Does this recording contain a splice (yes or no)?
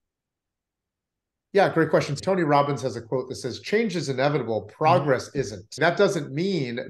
yes